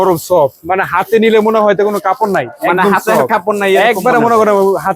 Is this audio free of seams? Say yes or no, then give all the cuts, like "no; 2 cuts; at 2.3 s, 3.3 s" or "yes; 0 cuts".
yes; 0 cuts